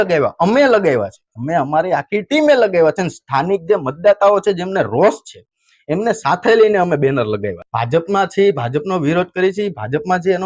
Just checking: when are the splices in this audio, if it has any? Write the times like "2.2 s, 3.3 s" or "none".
none